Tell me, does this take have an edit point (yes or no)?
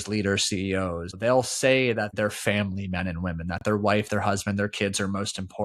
yes